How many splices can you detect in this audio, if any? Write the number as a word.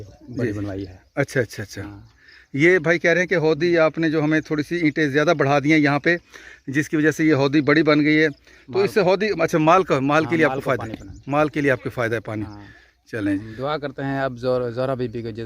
one